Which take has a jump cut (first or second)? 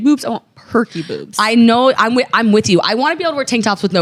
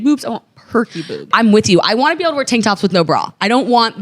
second